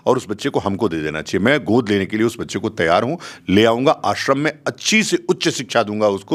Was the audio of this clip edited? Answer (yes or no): no